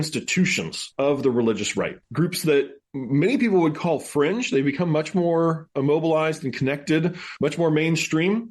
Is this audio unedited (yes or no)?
no